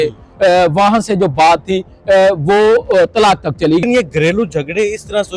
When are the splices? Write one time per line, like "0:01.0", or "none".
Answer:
0:03.8